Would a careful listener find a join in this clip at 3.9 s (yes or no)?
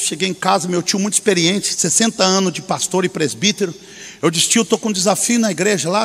no